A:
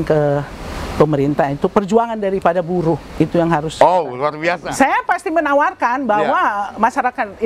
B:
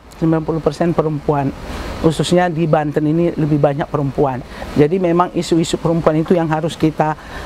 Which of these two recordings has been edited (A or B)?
A